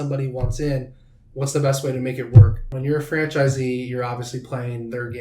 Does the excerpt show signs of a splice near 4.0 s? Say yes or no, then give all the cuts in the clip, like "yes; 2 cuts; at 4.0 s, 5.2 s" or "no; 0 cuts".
no; 1 cut; at 2.7 s